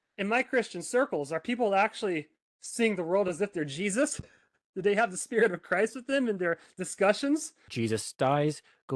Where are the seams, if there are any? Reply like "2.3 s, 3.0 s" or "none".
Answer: 7.7 s